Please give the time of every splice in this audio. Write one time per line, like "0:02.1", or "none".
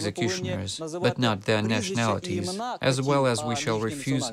none